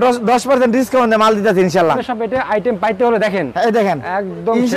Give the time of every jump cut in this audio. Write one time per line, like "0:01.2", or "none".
0:02.0